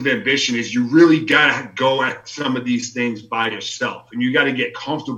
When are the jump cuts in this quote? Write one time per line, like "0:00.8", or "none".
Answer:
none

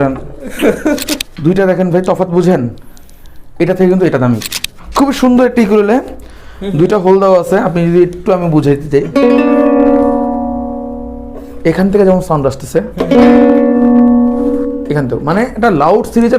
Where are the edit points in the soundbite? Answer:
0:01.2
0:04.8

